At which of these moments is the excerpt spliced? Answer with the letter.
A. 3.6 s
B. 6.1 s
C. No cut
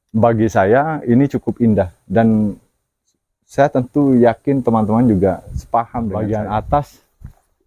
B